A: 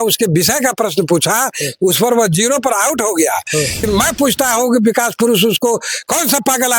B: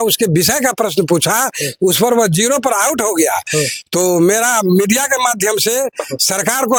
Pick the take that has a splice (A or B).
A